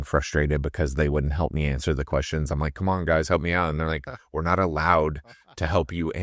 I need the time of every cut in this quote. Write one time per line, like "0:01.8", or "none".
none